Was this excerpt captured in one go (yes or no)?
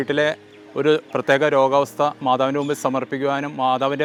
yes